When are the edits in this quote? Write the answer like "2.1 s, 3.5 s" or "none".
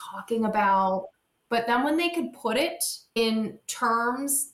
1.1 s